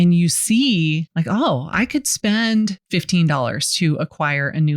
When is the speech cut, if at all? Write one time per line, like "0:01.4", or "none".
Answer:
0:01.1
0:02.8